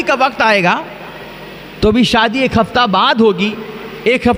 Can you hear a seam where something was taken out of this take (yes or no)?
no